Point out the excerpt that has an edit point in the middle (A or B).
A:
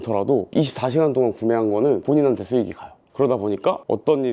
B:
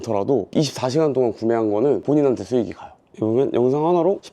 B